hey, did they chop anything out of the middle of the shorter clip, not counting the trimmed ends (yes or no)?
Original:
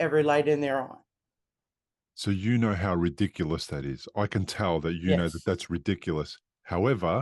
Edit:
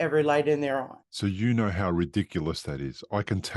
yes